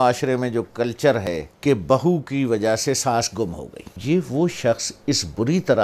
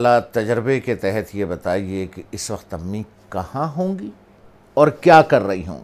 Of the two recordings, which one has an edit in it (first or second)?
first